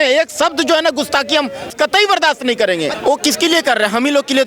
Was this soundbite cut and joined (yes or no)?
yes